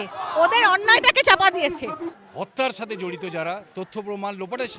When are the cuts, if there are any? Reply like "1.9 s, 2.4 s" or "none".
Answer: 2.2 s